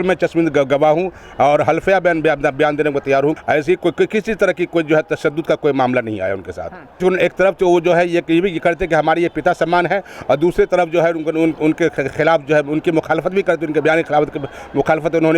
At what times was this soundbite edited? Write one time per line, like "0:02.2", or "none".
0:03.4
0:07.0